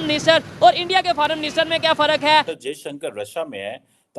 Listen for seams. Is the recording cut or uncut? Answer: cut